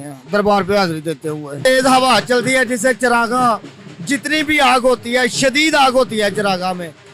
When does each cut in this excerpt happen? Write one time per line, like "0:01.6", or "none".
0:01.6